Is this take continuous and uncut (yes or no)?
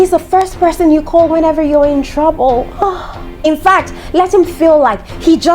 no